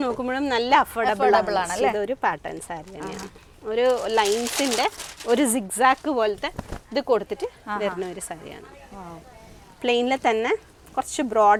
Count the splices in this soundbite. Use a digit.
0